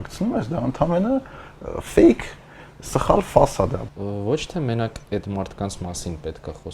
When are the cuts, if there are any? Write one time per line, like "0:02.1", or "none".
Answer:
0:03.8

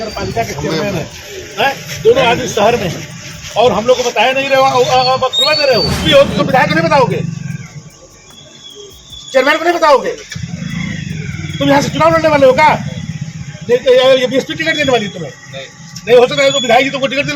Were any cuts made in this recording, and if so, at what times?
0:06.0

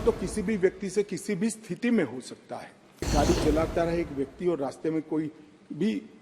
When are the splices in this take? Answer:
0:03.1

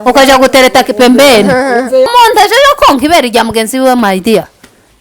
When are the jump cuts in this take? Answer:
0:02.1

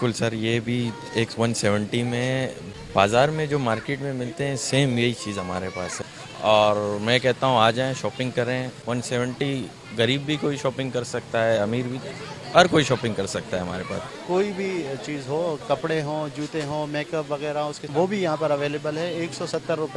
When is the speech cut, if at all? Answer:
0:02.6
0:05.9
0:08.7
0:14.1
0:17.9

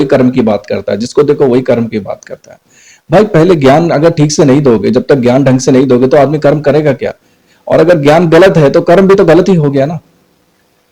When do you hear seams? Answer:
none

